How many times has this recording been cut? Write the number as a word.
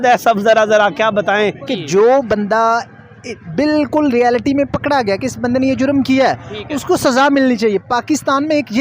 one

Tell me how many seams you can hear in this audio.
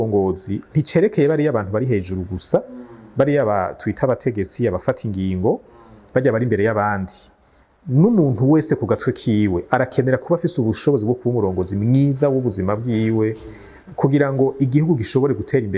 zero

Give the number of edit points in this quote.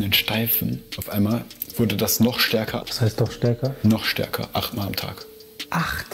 three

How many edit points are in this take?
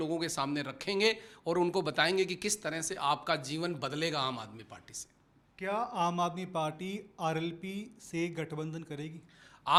zero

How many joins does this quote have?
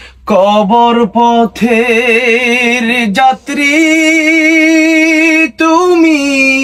zero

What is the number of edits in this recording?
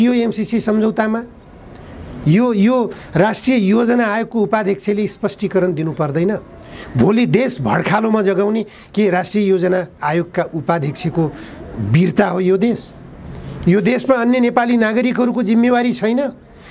zero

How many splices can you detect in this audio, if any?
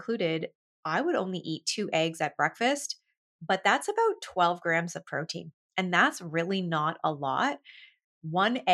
zero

